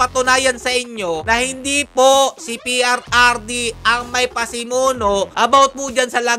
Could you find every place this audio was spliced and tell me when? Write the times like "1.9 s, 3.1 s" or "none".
none